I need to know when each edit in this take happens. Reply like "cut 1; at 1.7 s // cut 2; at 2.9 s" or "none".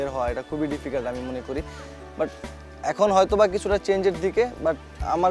none